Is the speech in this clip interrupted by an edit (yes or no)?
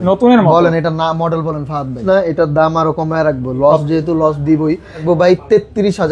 yes